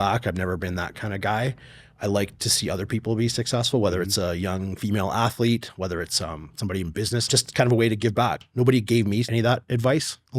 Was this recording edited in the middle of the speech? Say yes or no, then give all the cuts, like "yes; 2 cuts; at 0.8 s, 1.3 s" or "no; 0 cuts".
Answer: yes; 3 cuts; at 7.3 s, 8.4 s, 9.3 s